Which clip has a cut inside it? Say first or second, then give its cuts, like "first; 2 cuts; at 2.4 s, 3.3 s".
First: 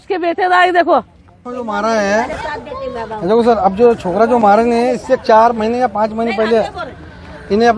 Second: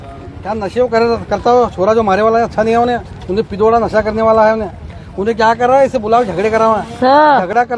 first; 1 cut; at 1.5 s